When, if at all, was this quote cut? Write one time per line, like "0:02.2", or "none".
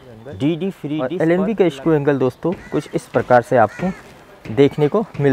0:01.0